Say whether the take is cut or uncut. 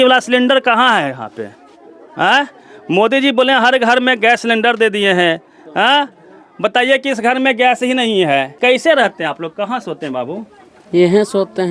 cut